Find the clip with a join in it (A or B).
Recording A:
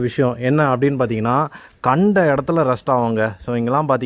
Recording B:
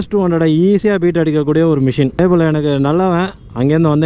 B